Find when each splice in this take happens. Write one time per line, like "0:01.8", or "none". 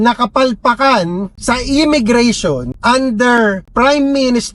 0:01.3
0:02.7
0:03.6